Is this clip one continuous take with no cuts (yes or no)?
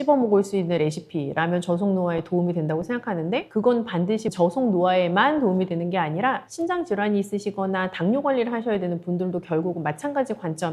yes